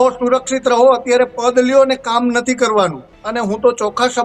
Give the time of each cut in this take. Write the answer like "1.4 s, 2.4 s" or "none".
3.1 s